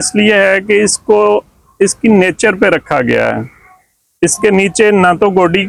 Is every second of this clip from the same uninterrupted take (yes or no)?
yes